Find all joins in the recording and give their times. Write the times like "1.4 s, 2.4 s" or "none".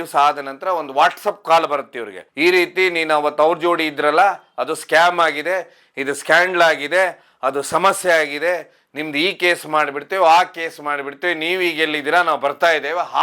none